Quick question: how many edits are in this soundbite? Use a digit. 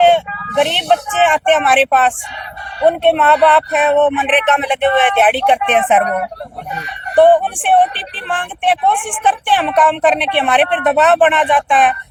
0